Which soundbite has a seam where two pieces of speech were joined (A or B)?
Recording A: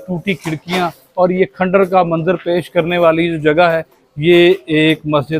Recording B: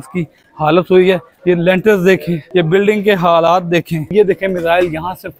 B